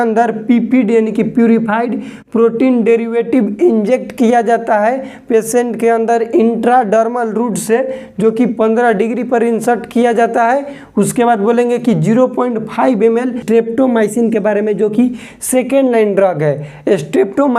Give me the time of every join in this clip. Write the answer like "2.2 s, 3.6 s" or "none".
13.4 s